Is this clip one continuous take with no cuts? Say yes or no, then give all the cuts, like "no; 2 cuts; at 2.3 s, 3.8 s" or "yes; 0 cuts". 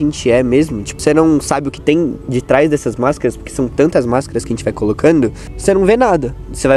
no; 2 cuts; at 1.0 s, 5.5 s